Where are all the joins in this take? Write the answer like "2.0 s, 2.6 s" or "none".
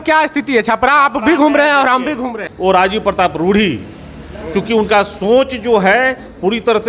2.4 s

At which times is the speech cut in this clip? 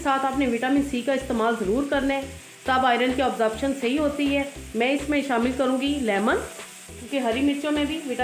7.0 s

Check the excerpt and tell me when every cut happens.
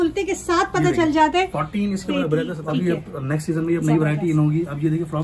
2.6 s

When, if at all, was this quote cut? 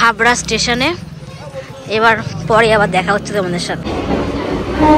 3.9 s

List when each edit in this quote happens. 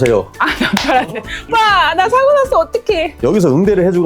3.1 s

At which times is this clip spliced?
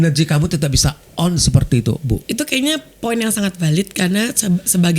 2.2 s

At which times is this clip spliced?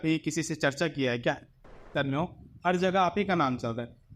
1.9 s

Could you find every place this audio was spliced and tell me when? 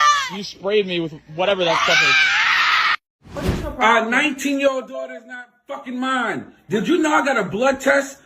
3.1 s

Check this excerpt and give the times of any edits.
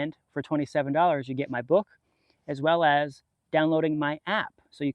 none

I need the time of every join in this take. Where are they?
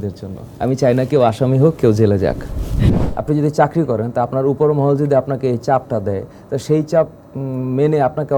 3.0 s

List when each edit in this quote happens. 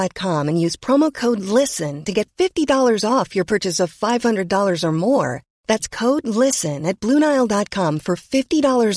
none

